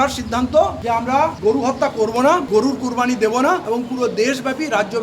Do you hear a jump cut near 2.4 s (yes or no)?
yes